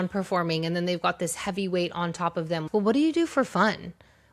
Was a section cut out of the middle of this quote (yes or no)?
yes